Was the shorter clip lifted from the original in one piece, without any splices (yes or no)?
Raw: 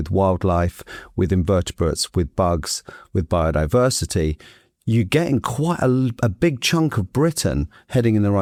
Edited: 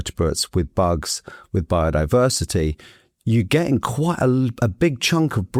yes